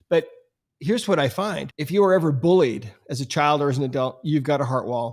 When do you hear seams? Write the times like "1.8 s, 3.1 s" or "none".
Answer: 1.7 s